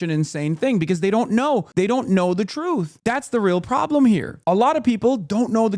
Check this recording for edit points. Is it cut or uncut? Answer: cut